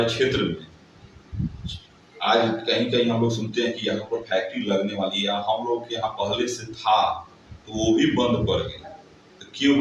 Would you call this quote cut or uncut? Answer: uncut